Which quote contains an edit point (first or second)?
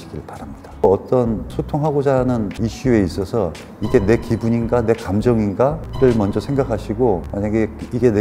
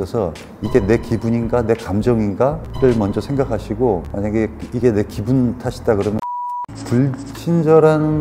second